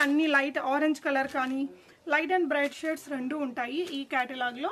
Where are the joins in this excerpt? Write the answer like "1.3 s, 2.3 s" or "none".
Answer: none